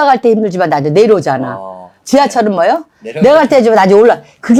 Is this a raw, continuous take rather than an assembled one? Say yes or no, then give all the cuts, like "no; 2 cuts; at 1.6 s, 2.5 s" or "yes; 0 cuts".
yes; 0 cuts